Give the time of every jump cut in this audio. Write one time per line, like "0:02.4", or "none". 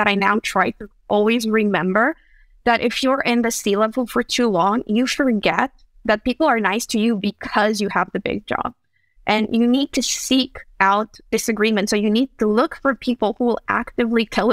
none